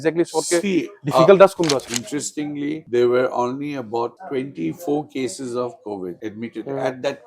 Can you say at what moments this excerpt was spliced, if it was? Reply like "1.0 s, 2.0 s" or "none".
1.9 s